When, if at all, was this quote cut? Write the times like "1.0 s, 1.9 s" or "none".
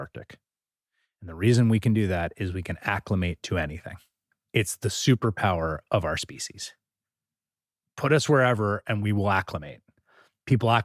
none